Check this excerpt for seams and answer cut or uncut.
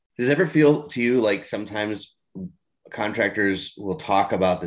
uncut